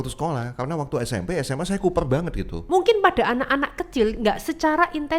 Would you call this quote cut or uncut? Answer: cut